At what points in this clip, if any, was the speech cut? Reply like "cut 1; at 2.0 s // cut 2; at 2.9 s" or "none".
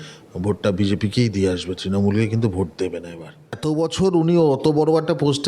cut 1; at 3.6 s